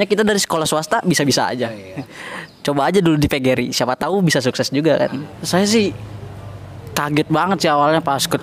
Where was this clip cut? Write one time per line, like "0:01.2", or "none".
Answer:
0:02.0
0:05.3